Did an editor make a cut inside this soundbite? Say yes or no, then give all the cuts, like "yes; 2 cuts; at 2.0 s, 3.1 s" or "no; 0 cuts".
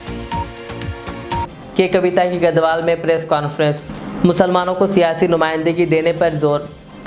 yes; 1 cut; at 1.3 s